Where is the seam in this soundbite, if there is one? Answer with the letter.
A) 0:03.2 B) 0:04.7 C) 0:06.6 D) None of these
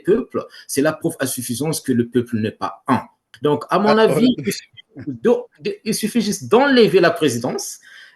A